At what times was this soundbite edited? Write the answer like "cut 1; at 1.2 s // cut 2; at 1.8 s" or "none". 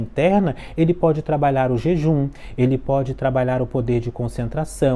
none